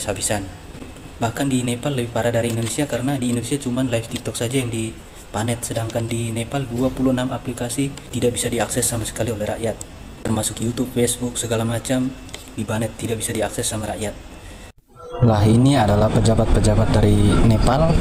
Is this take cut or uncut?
uncut